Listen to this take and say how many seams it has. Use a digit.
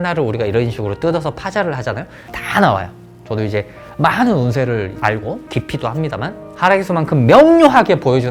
0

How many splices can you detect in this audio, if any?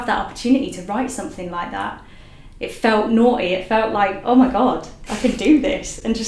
0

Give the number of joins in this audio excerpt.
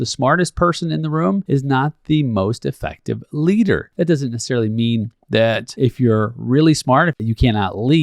4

